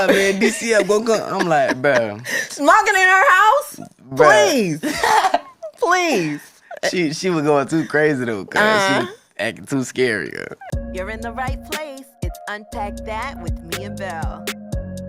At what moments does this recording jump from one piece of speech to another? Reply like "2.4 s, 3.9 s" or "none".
10.7 s